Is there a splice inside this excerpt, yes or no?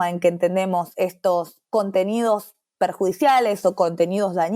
yes